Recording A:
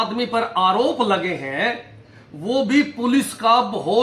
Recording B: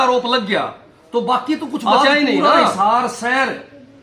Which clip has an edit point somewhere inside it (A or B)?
B